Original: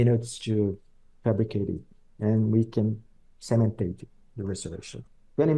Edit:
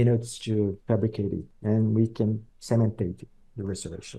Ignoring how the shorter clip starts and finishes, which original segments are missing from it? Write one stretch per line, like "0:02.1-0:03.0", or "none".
0:01.2-0:01.8
0:03.1-0:03.3